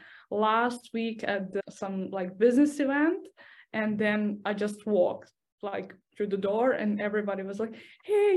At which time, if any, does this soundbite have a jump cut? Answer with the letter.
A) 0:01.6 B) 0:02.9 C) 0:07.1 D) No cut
A